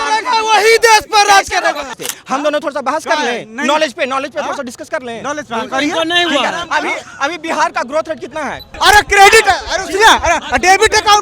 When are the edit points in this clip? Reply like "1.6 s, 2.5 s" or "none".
1.9 s, 8.7 s